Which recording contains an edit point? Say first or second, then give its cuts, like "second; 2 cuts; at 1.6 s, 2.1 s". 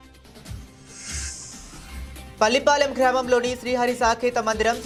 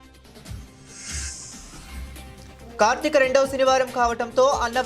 second; 1 cut; at 2.2 s